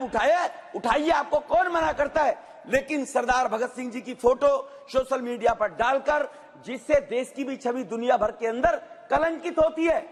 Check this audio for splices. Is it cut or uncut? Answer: uncut